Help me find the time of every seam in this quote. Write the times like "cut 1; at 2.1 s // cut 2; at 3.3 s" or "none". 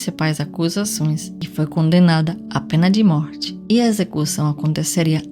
cut 1; at 1.3 s

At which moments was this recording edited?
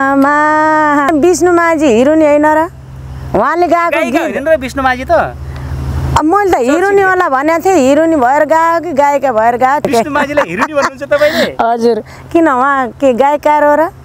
cut 1; at 1.1 s // cut 2; at 9.9 s

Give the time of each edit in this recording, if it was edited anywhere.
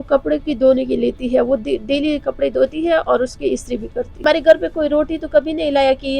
cut 1; at 4.1 s

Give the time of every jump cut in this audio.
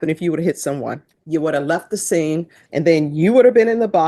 cut 1; at 1.1 s // cut 2; at 2.6 s

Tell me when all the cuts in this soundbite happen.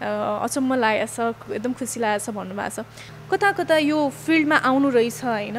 cut 1; at 3.1 s

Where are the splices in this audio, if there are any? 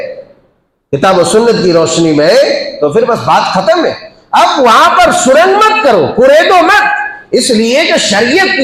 none

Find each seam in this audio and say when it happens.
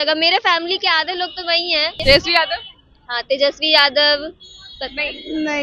cut 1; at 2.0 s

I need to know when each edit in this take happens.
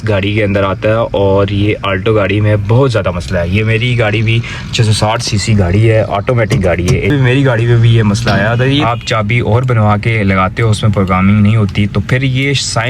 cut 1; at 6.1 s // cut 2; at 7.1 s // cut 3; at 8.8 s

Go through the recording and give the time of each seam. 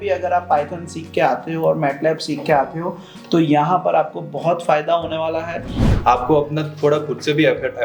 cut 1; at 6.0 s

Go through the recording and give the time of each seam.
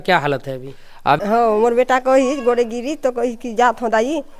cut 1; at 1.2 s

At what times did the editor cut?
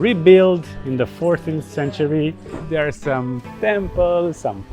cut 1; at 2.5 s

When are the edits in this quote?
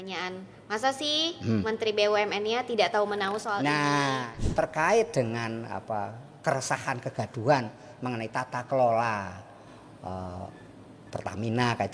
cut 1; at 4.3 s

